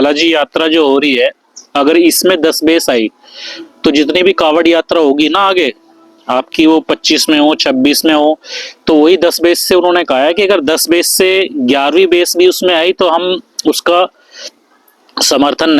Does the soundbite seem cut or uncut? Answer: uncut